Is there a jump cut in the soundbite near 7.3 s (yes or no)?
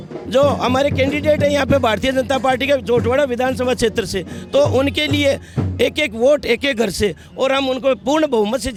no